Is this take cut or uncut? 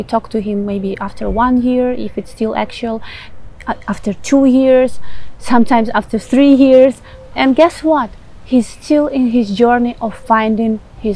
uncut